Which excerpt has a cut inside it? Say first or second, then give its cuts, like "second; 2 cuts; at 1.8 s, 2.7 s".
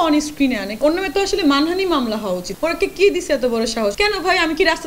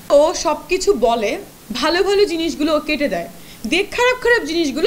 first; 3 cuts; at 0.8 s, 2.5 s, 3.9 s